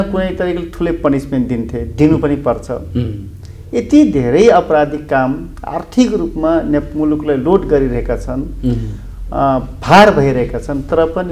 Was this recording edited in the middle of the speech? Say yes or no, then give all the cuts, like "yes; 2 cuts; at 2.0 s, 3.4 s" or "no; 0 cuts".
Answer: no; 0 cuts